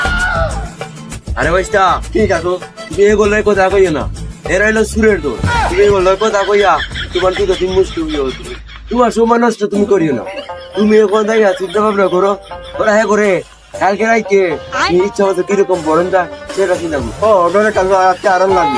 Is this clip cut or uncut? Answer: uncut